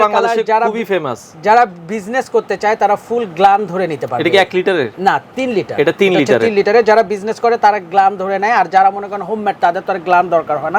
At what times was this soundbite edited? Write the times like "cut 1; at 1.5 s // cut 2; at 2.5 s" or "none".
none